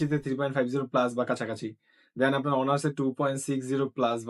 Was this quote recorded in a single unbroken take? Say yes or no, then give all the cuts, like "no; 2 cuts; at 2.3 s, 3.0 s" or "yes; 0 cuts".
yes; 0 cuts